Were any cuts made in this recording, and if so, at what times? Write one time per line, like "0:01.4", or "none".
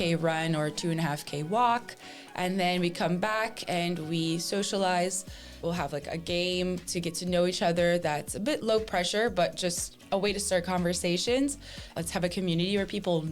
0:05.6
0:11.9